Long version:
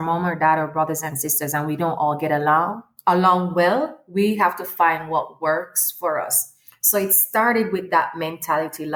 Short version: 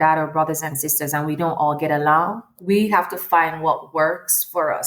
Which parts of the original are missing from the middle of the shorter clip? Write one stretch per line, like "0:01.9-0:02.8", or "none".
0:02.9-0:04.0